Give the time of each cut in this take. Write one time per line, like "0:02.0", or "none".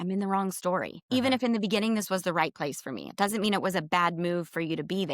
0:00.9